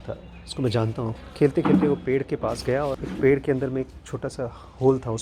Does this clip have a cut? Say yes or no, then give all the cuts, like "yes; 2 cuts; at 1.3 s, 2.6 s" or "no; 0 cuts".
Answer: yes; 2 cuts; at 1.1 s, 3.0 s